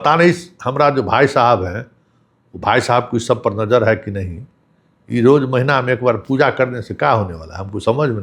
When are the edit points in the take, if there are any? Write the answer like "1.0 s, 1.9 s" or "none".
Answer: none